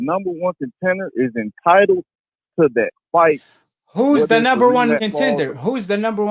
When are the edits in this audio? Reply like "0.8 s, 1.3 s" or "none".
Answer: 5.0 s